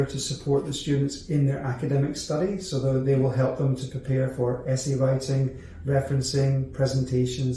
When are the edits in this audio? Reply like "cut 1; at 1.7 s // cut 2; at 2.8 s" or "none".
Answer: none

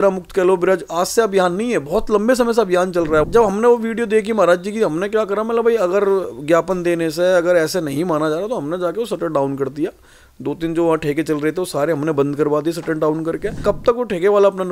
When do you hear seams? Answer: cut 1; at 3.3 s // cut 2; at 13.6 s

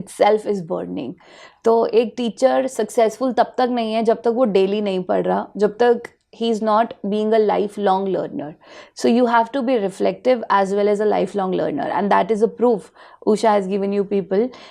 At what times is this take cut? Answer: none

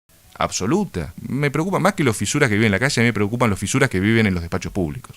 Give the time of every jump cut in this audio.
cut 1; at 1.2 s

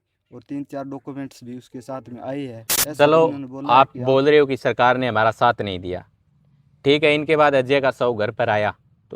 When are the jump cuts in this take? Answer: cut 1; at 2.7 s

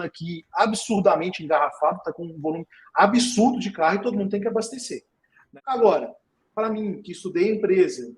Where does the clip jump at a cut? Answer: cut 1; at 5.4 s

